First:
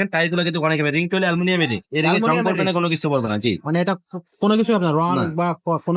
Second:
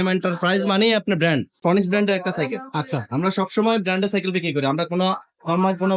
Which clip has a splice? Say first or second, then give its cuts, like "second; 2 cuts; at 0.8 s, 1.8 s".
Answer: second; 1 cut; at 1.6 s